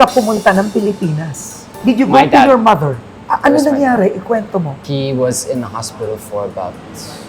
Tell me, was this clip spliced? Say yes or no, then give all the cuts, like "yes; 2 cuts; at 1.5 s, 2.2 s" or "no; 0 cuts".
no; 0 cuts